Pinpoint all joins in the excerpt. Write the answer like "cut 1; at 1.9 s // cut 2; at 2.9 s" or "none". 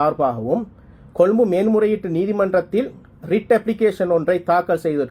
none